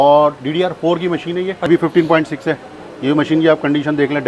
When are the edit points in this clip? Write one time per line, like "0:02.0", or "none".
0:01.7